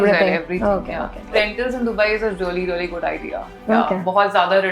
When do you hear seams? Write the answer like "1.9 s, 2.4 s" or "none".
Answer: 1.3 s